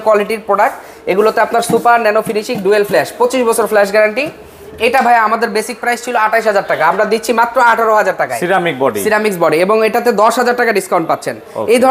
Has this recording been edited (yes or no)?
no